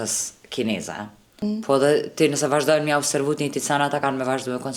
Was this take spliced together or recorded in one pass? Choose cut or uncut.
cut